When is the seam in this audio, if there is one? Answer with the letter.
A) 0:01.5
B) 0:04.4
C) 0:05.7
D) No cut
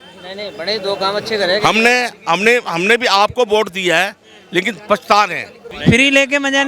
C